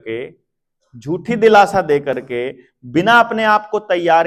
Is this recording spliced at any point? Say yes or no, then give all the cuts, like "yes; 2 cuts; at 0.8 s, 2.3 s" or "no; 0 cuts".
no; 0 cuts